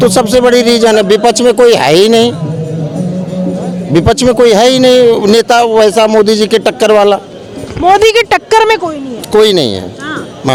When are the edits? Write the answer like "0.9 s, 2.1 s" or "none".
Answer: none